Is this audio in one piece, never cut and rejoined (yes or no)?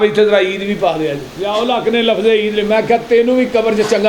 no